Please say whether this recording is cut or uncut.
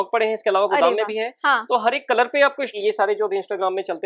cut